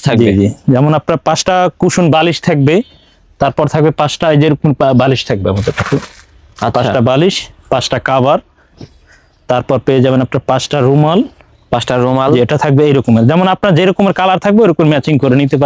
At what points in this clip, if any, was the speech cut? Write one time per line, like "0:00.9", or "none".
none